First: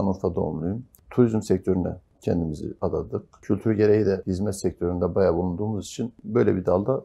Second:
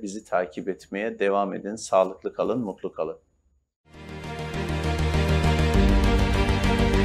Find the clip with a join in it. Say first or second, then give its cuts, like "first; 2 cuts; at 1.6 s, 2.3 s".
first; 5 cuts; at 0.9 s, 2.1 s, 3.2 s, 4.3 s, 6.2 s